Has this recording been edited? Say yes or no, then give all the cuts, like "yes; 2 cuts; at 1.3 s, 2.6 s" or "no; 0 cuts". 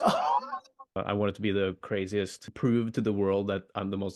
yes; 2 cuts; at 1.0 s, 2.4 s